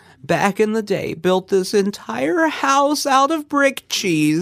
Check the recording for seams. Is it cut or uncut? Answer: uncut